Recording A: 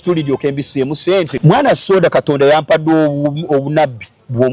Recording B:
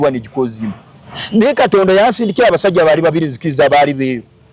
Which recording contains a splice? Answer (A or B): A